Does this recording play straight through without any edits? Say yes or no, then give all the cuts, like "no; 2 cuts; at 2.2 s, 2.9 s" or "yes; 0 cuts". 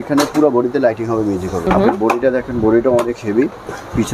no; 1 cut; at 1.7 s